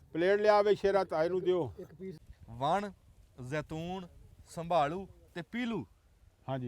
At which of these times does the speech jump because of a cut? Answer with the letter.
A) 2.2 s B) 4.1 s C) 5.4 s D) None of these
A